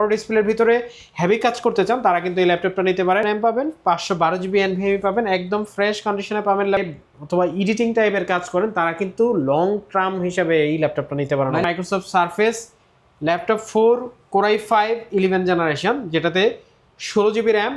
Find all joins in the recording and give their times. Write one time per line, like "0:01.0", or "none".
0:03.2
0:06.8
0:11.6